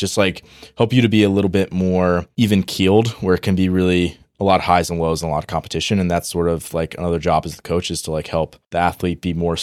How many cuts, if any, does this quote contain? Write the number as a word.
two